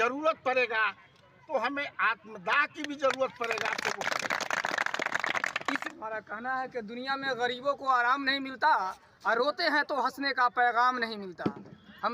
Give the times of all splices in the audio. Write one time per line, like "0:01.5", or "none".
0:05.8